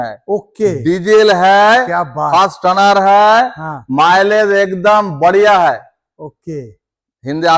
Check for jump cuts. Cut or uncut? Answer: uncut